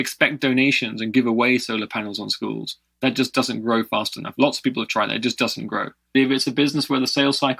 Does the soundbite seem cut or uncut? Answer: cut